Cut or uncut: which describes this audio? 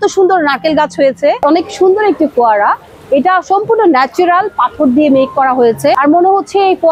cut